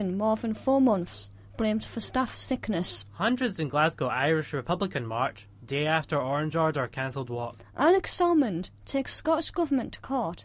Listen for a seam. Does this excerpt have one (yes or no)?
yes